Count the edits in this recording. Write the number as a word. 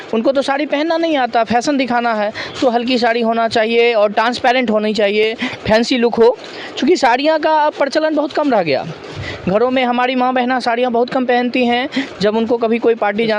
zero